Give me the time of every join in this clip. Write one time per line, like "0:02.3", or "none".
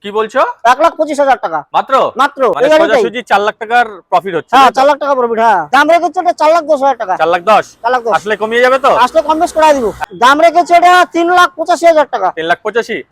0:02.6
0:05.7
0:10.1

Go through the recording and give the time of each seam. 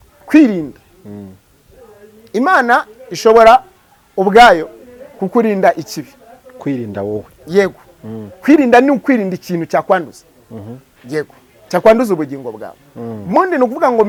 none

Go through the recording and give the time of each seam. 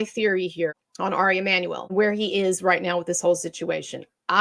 0:00.8
0:01.9

